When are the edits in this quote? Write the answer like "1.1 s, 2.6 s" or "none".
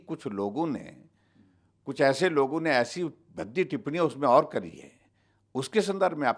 none

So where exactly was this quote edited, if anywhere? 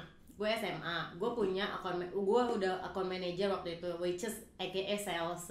none

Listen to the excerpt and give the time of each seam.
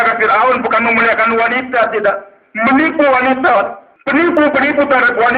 4.3 s

